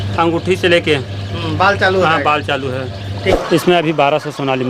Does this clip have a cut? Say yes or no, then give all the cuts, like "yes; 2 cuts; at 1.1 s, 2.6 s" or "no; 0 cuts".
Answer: yes; 1 cut; at 3.4 s